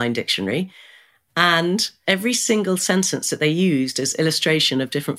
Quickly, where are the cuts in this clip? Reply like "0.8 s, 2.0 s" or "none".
2.0 s